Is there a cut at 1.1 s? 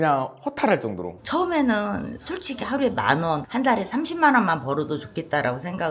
yes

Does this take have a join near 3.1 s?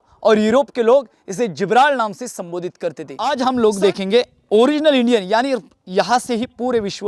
yes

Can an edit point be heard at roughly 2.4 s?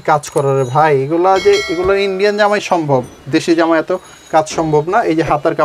no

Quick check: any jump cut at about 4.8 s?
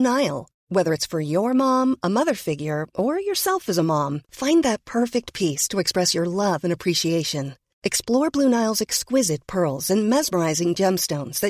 no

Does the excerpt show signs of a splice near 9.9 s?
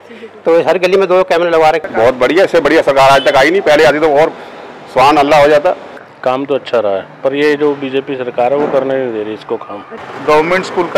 yes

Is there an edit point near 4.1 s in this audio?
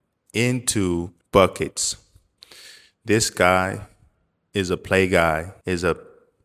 no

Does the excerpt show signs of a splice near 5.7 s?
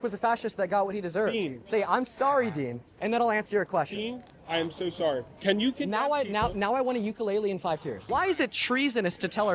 no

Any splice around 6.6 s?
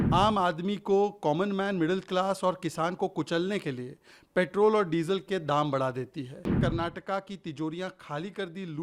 yes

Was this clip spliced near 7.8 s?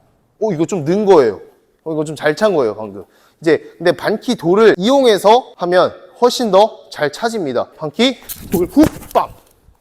yes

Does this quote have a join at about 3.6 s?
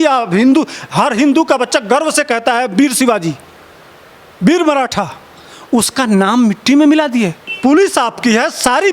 no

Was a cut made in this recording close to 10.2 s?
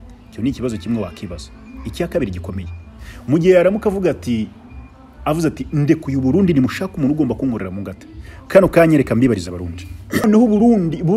yes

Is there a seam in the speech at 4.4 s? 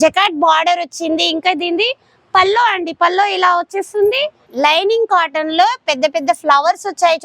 yes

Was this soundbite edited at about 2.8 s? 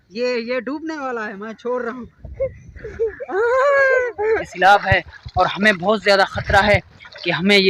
no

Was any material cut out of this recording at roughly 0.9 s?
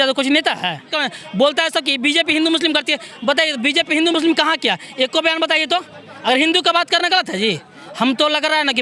yes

